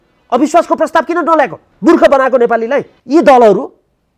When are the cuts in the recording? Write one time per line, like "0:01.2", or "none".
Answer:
0:01.7
0:02.9